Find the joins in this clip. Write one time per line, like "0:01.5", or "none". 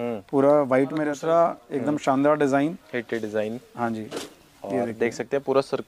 0:01.1